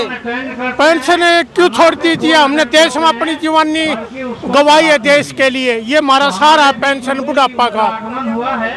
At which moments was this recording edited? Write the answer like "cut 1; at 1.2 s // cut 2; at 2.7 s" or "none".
none